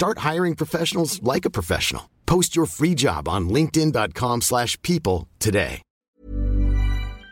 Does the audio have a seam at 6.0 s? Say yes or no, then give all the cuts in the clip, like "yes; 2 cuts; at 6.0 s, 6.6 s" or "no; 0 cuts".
yes; 1 cut; at 6.0 s